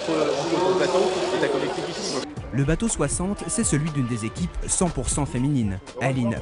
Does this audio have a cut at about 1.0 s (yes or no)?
no